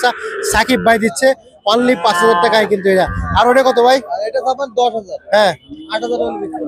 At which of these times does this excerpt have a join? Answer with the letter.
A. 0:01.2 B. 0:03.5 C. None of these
C